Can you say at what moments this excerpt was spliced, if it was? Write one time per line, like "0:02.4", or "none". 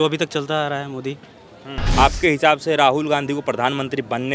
0:02.0